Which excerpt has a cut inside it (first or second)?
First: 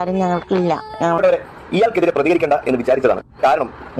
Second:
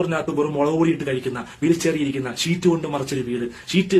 first